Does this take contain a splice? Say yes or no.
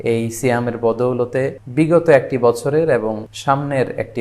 yes